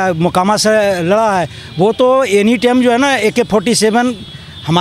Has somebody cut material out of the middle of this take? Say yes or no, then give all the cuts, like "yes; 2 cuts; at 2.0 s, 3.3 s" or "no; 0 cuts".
no; 0 cuts